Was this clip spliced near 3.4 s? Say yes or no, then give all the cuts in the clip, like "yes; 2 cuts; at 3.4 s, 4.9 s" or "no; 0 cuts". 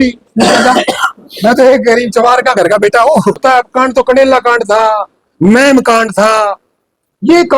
yes; 1 cut; at 3.4 s